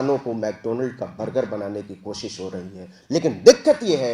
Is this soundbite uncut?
yes; 0 cuts

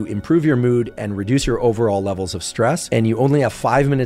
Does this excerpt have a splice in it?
yes; 1 cut; at 2.8 s

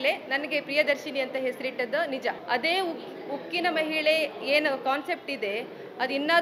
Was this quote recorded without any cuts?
no; 1 cut; at 2.4 s

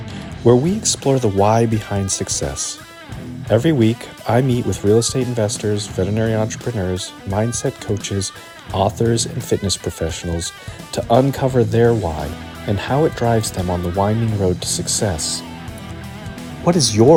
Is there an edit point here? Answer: no; 0 cuts

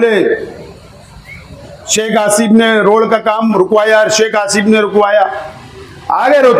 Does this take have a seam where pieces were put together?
no; 0 cuts

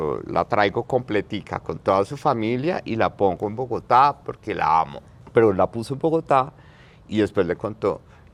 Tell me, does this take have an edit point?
no; 0 cuts

